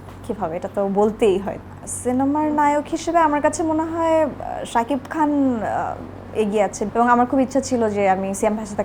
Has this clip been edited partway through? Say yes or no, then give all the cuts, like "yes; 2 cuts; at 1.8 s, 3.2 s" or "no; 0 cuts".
yes; 2 cuts; at 1.5 s, 6.8 s